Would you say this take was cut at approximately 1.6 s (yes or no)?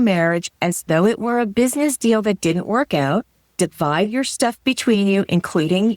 no